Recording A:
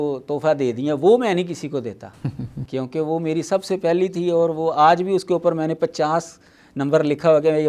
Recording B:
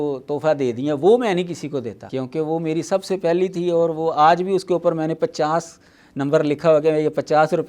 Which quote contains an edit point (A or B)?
B